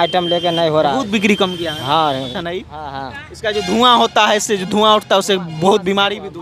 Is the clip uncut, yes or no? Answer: no